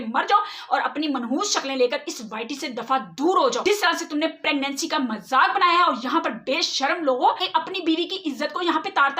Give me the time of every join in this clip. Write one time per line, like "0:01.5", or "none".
0:03.6
0:07.4

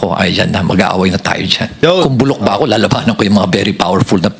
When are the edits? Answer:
0:01.7

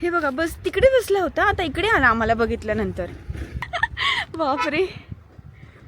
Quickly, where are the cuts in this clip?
0:03.7

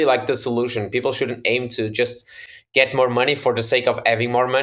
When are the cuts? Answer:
none

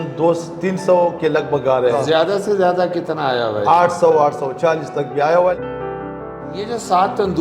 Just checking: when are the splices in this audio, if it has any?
0:02.0
0:05.6

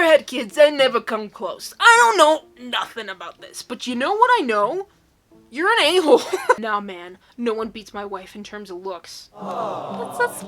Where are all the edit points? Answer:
0:06.6

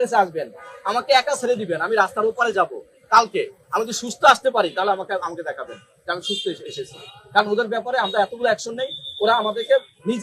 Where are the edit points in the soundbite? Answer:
none

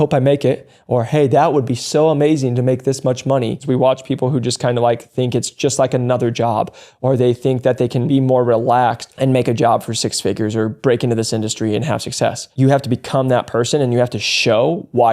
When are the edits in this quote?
0:03.6
0:09.1
0:12.5

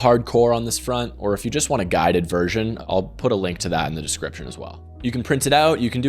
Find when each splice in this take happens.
0:02.8

